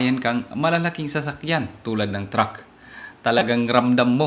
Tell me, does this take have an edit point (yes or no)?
no